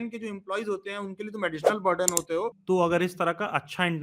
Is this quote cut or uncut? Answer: cut